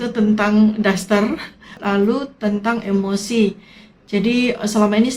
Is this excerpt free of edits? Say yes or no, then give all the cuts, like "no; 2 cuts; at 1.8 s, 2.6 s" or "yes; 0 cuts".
no; 1 cut; at 1.8 s